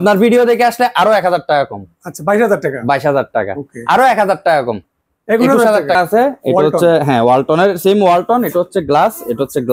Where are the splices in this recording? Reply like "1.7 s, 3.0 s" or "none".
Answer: 6.0 s